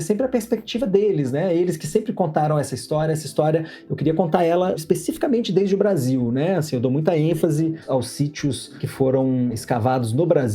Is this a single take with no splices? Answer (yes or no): no